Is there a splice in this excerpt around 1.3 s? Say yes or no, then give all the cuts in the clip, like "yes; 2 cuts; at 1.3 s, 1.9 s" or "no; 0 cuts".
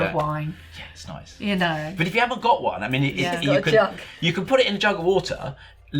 no; 0 cuts